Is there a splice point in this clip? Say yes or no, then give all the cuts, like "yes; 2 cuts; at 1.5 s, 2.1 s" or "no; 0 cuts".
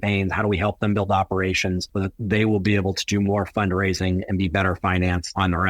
no; 0 cuts